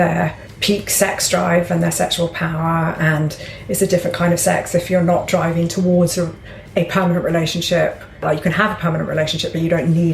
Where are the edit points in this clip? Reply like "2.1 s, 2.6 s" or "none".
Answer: 8.2 s